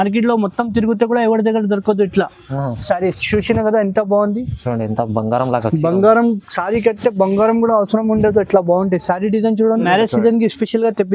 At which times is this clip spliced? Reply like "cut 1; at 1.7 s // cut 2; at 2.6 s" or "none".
cut 1; at 9.8 s

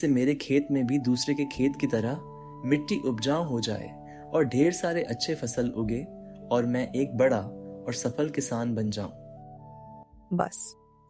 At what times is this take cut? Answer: none

